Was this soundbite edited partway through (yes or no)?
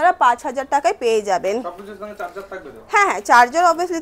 no